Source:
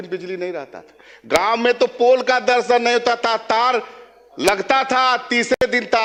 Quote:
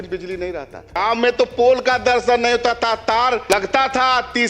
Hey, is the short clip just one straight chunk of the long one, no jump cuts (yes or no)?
no